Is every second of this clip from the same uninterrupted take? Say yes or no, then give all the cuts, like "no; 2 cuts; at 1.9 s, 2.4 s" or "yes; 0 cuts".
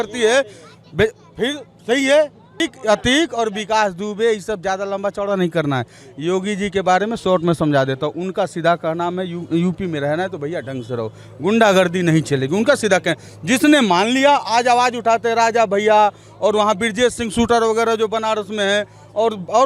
no; 1 cut; at 2.5 s